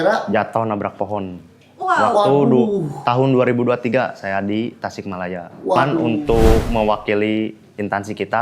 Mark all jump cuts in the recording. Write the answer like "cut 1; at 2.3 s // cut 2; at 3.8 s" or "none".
cut 1; at 6.0 s